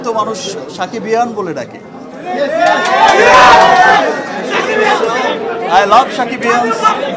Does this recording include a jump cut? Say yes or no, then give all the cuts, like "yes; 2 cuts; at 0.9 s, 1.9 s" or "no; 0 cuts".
no; 0 cuts